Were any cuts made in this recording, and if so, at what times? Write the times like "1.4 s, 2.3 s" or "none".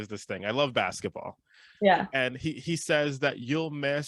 none